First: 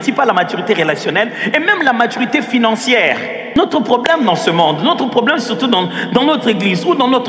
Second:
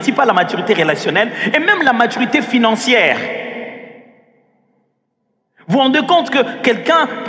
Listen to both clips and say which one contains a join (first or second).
first